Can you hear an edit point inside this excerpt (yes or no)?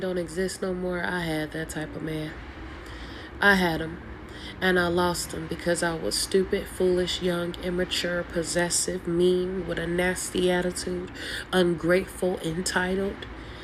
no